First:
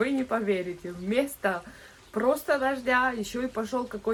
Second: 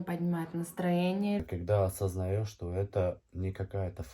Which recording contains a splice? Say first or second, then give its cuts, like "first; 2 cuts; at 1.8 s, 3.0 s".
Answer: second; 1 cut; at 1.4 s